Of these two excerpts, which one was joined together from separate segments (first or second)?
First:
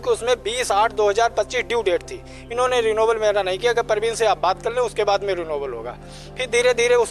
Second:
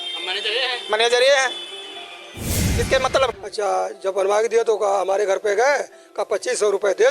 second